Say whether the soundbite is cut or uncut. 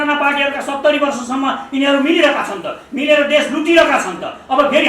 uncut